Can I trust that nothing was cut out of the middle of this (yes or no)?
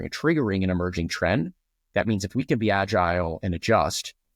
yes